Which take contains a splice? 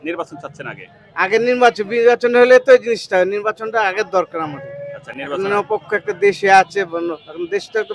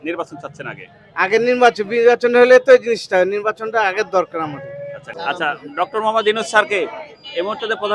second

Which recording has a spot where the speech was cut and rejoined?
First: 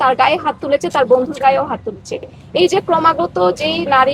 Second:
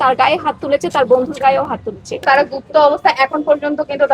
second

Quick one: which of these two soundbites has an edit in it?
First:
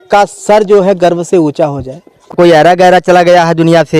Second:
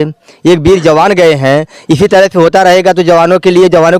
first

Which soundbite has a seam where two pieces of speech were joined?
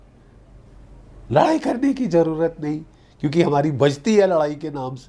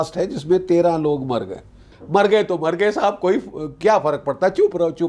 second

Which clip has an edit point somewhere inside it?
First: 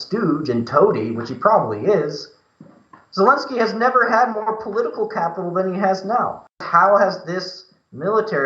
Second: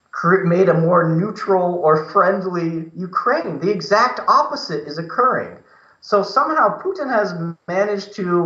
first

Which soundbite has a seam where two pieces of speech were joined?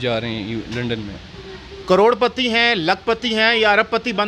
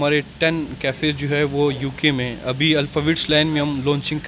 first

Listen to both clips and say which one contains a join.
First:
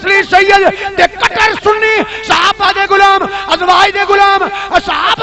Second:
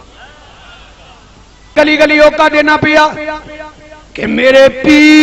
second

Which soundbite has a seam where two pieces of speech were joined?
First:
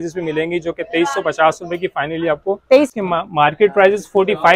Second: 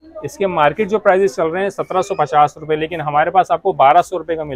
first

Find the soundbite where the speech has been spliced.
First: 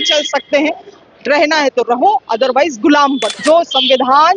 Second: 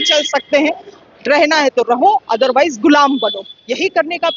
first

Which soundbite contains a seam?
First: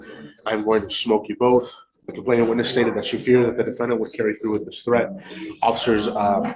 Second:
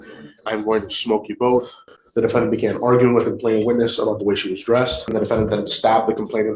second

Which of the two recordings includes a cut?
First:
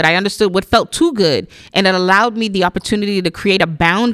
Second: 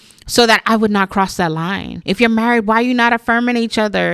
second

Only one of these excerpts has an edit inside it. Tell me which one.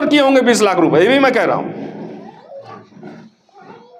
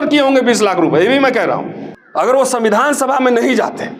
second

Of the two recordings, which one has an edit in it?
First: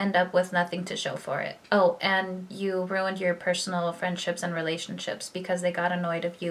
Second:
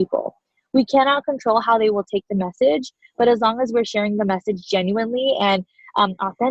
first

